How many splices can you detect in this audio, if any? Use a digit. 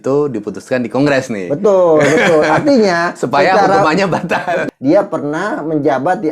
1